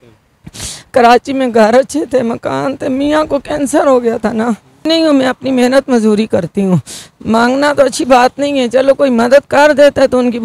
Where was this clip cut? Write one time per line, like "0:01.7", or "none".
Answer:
0:04.8